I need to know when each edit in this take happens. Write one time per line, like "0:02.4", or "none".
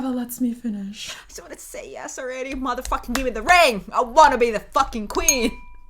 0:01.1